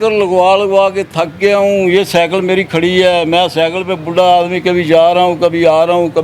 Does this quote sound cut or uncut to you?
uncut